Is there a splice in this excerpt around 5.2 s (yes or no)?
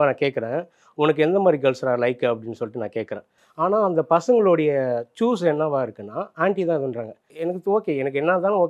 no